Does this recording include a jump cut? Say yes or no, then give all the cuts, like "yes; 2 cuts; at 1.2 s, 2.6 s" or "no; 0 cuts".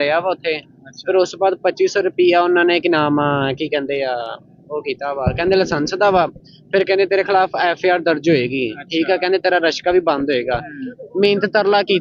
no; 0 cuts